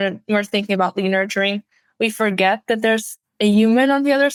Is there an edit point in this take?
no; 0 cuts

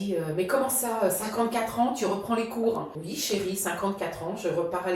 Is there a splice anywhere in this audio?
yes; 1 cut; at 3.0 s

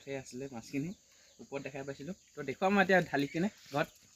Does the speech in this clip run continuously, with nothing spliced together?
yes; 0 cuts

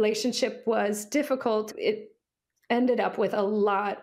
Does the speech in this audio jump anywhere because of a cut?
yes; 1 cut; at 1.7 s

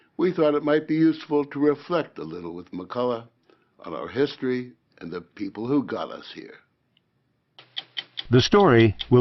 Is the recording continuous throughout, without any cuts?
yes; 0 cuts

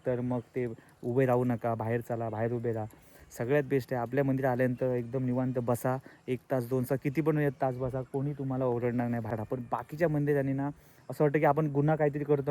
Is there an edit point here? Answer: yes; 1 cut; at 9.3 s

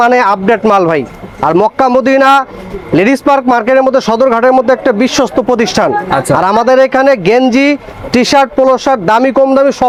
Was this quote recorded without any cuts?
yes; 0 cuts

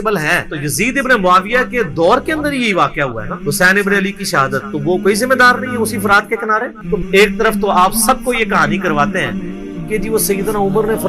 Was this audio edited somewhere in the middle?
yes; 1 cut; at 6.9 s

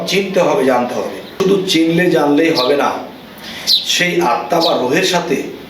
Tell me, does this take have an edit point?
yes; 1 cut; at 1.3 s

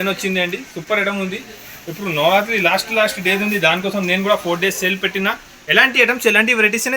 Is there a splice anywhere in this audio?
no; 0 cuts

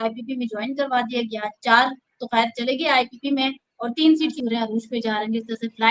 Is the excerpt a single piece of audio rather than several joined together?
no; 1 cut; at 4.3 s

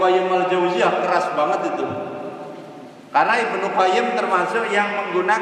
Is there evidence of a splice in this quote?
no; 0 cuts

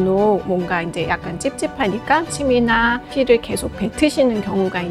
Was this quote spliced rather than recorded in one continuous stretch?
no; 0 cuts

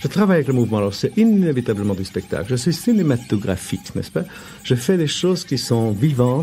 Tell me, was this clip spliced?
yes; 1 cut; at 5.5 s

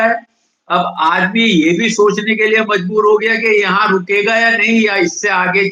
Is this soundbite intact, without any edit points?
yes; 0 cuts

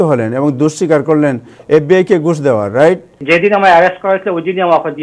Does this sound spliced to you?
yes; 1 cut; at 3.2 s

